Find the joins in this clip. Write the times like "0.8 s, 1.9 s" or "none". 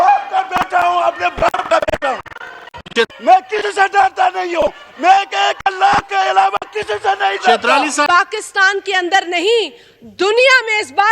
3.1 s, 8.1 s